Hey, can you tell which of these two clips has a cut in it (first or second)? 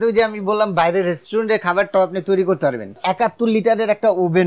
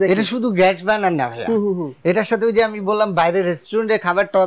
first